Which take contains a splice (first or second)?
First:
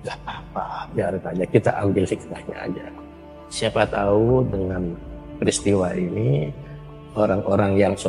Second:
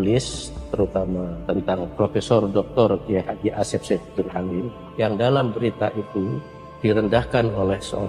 second